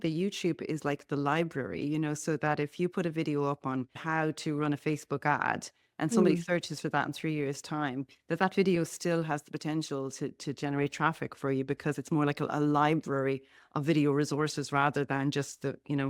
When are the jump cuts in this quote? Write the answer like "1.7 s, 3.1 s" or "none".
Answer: none